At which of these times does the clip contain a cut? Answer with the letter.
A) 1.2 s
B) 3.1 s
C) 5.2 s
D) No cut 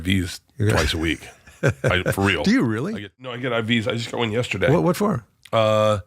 B